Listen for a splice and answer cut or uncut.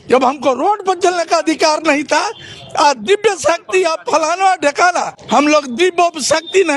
cut